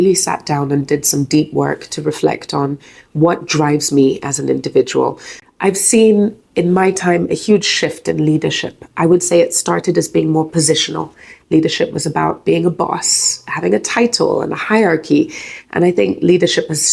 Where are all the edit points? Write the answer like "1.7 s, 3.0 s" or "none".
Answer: 5.3 s